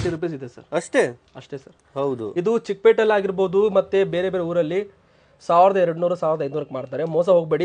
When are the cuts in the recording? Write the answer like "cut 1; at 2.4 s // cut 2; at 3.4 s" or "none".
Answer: none